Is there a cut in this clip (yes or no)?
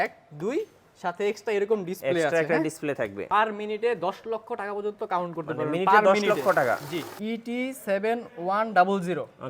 yes